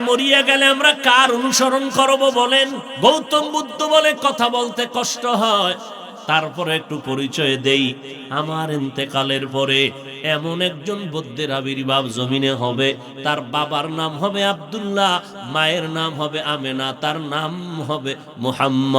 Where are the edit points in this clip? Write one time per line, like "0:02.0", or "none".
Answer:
0:02.9
0:13.1